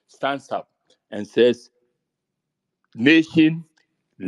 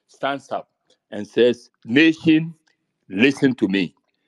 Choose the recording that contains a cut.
second; 1 cut; at 1.7 s

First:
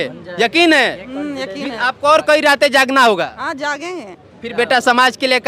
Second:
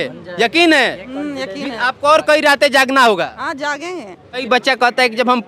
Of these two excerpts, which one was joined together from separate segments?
second; 1 cut; at 4.4 s

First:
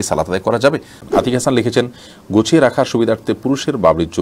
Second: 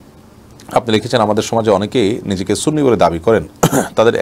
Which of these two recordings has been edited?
first; 1 cut; at 1.0 s

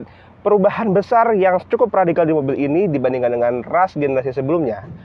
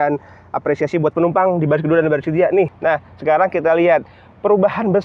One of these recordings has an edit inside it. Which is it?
second; 1 cut; at 2.7 s

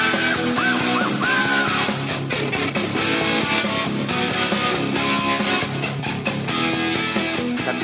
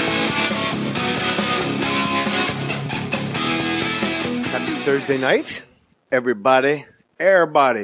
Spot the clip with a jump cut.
first; 1 cut; at 1.5 s

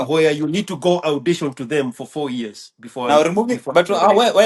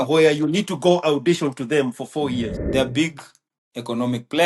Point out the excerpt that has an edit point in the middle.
second; 1 cut; at 2.6 s

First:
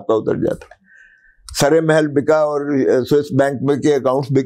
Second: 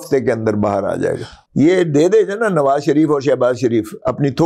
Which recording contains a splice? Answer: second; 1 cut; at 1.3 s

